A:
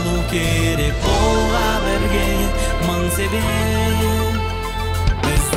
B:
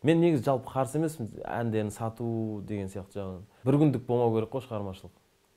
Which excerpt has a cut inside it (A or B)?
B